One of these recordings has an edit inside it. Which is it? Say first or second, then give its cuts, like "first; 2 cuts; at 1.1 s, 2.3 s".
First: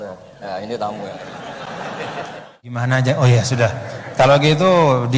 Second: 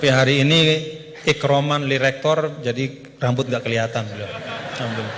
first; 1 cut; at 2.8 s